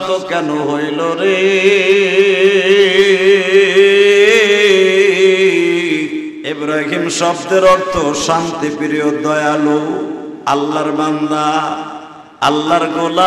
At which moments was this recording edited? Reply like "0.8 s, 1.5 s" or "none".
6.4 s